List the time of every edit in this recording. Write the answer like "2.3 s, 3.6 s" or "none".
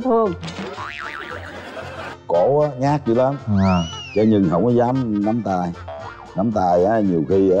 2.0 s, 4.0 s